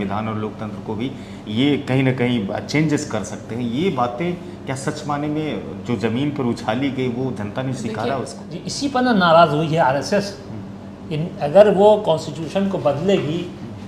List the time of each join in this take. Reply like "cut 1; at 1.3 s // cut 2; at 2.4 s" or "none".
cut 1; at 8.4 s